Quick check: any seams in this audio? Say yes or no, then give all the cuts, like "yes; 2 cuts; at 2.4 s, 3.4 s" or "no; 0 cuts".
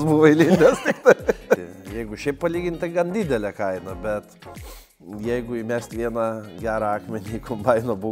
yes; 1 cut; at 1.6 s